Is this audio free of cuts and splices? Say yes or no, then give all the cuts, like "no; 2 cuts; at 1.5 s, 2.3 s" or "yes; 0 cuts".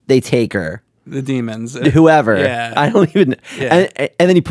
no; 1 cut; at 1.8 s